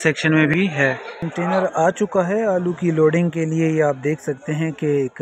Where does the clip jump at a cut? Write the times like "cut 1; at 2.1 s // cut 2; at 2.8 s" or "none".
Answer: cut 1; at 1.3 s